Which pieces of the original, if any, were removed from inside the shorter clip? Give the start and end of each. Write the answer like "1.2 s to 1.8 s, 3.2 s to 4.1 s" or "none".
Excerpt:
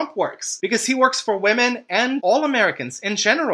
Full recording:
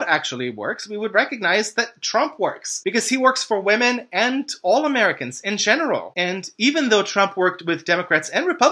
4.4 s to 4.6 s